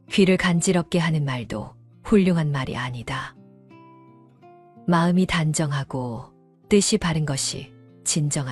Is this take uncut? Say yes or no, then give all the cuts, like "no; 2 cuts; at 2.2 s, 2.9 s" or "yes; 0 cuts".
yes; 0 cuts